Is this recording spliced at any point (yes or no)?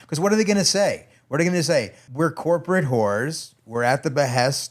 yes